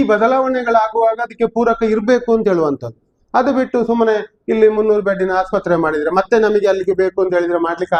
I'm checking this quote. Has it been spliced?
no; 0 cuts

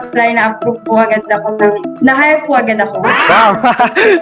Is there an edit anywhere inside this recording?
no; 0 cuts

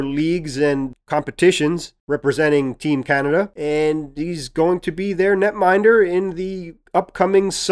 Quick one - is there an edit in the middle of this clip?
yes; 1 cut; at 3.6 s

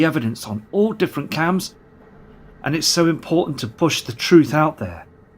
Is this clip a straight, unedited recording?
no; 1 cut; at 2.6 s

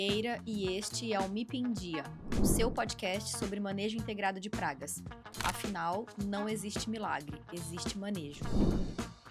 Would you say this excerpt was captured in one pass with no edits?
yes; 0 cuts

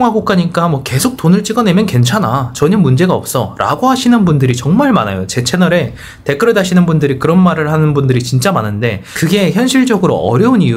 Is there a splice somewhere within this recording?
no; 0 cuts

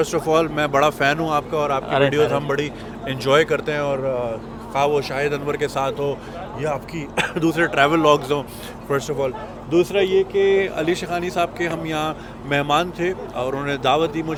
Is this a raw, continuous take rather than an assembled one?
yes; 0 cuts

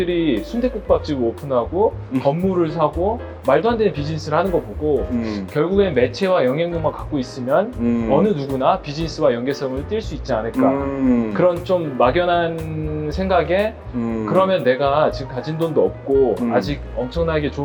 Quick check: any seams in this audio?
no; 0 cuts

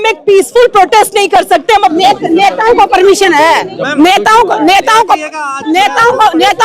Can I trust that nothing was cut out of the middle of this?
no; 1 cut; at 1.8 s

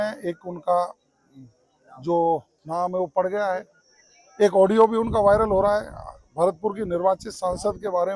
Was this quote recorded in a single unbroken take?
yes; 0 cuts

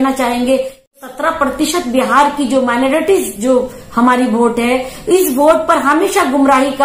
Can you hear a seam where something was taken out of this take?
yes; 1 cut; at 0.9 s

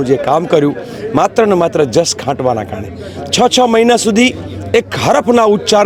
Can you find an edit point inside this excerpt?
no; 0 cuts

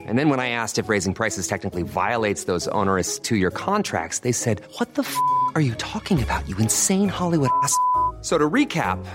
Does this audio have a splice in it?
no; 0 cuts

